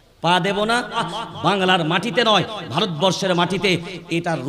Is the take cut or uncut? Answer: cut